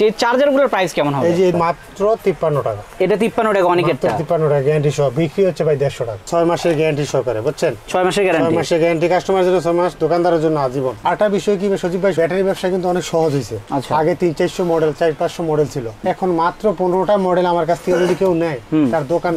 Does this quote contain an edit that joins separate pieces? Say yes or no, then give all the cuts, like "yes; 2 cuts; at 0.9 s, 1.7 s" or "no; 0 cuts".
yes; 3 cuts; at 1.5 s, 6.3 s, 10.9 s